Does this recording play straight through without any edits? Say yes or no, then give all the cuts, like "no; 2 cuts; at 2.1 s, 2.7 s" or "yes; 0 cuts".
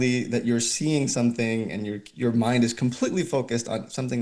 yes; 0 cuts